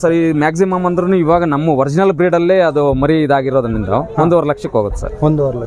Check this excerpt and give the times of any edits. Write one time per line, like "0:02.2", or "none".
none